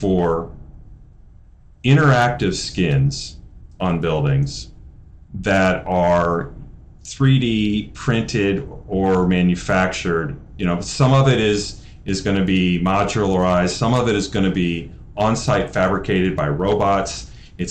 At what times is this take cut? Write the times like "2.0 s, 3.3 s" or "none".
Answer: none